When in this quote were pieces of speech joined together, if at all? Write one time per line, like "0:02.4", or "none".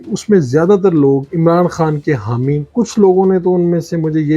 0:01.3
0:02.7